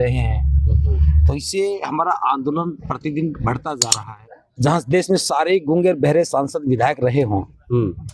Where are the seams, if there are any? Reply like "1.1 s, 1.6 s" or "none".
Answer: 3.9 s

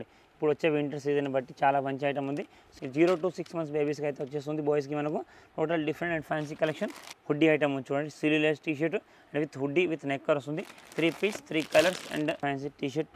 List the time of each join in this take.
2.6 s, 7.1 s, 12.4 s

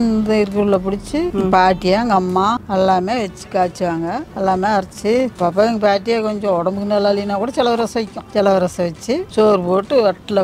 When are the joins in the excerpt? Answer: 1.3 s, 2.6 s, 4.2 s, 5.3 s, 8.2 s, 9.3 s

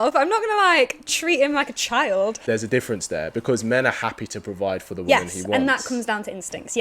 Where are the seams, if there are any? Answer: 2.4 s

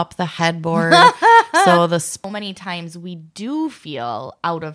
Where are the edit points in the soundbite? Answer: 2.2 s

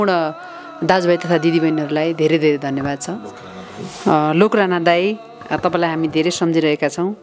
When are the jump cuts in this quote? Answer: none

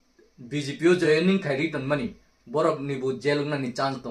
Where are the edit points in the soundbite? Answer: 1.0 s

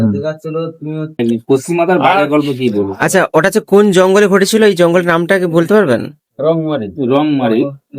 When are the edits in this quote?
1.2 s

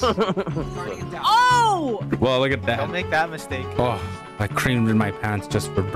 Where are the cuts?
1.9 s, 3.7 s

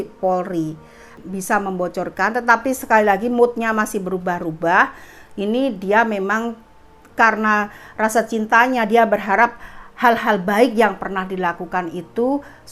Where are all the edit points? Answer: 1.2 s

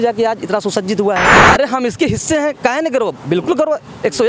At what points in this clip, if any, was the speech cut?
1.4 s

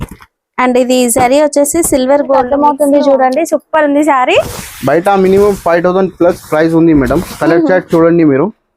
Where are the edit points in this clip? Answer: 2.5 s

